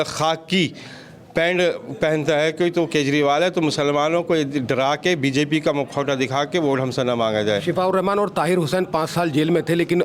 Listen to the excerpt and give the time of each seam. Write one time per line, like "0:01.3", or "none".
none